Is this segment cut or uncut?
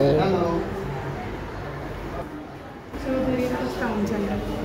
cut